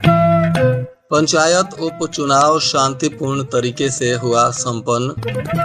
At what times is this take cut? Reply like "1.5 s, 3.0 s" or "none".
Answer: 0.9 s